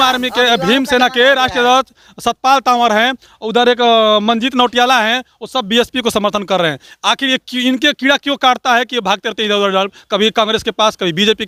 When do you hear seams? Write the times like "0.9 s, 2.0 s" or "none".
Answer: none